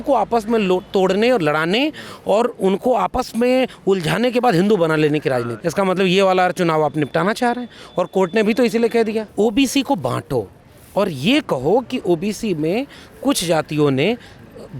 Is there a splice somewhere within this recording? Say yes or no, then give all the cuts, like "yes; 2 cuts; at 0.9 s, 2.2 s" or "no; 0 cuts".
yes; 2 cuts; at 5.5 s, 9.2 s